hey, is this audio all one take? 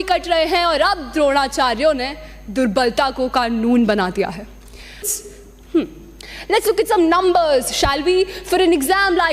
no; 1 cut; at 5.0 s

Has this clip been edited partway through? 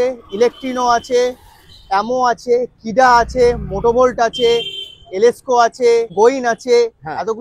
yes; 1 cut; at 6.1 s

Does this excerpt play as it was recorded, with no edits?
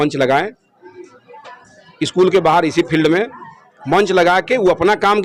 yes; 0 cuts

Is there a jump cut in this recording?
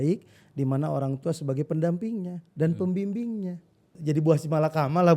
yes; 1 cut; at 3.9 s

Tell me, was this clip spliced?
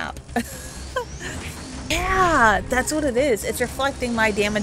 yes; 1 cut; at 1.9 s

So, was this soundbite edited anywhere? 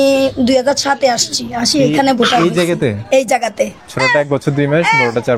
yes; 1 cut; at 3.8 s

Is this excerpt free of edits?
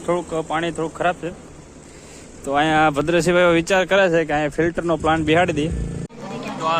no; 1 cut; at 5.9 s

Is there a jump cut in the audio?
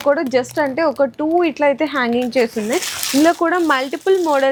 no; 0 cuts

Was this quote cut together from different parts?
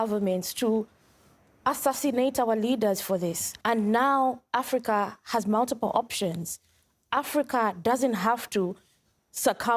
yes; 1 cut; at 3.5 s

